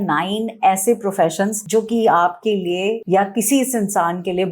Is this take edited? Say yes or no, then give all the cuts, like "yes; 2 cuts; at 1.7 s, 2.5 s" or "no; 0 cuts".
yes; 2 cuts; at 1.6 s, 3.0 s